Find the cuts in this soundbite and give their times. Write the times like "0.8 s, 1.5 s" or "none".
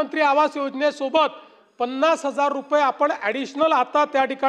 none